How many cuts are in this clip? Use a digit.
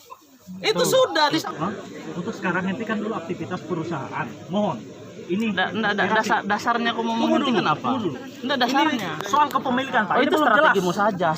1